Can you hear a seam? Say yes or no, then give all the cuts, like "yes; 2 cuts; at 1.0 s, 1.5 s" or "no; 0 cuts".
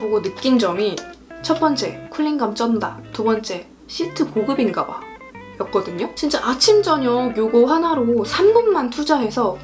yes; 1 cut; at 6.1 s